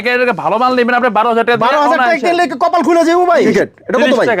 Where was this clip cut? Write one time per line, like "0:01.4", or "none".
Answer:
0:03.5